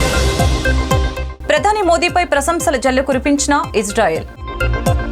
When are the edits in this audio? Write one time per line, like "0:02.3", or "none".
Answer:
none